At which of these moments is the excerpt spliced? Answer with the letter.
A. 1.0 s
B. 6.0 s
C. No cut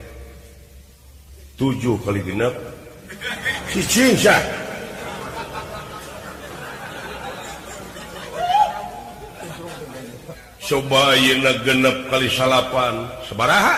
C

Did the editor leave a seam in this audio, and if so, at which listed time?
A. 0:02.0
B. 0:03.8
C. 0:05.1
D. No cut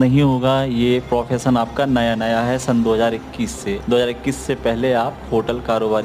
B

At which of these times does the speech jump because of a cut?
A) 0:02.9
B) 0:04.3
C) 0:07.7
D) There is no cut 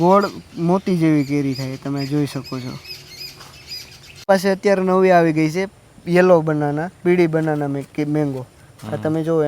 B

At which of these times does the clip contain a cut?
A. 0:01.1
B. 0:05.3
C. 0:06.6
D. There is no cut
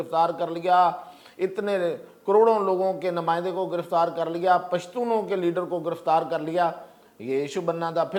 D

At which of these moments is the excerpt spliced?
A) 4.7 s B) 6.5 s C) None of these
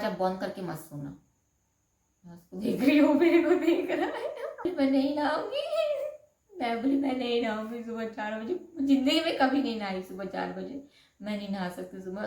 A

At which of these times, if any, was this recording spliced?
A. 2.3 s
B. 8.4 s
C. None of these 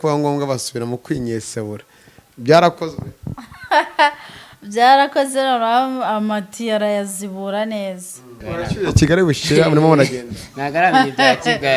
B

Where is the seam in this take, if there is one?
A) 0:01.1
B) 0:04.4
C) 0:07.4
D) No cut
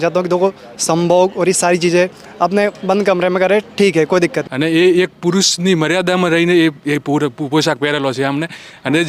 B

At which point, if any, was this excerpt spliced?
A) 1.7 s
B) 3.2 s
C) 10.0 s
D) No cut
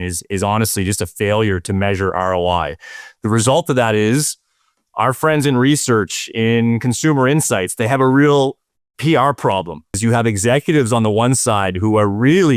C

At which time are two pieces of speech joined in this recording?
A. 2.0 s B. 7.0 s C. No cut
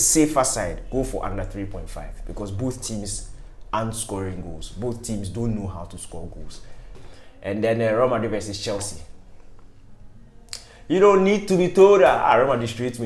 B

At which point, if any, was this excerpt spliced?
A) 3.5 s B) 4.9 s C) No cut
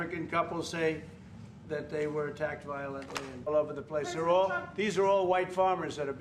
A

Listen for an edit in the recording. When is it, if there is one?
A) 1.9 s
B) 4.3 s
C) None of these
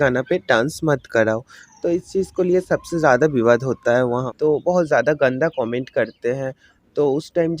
B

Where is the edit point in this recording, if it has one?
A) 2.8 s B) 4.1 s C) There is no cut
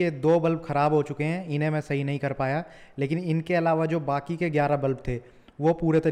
C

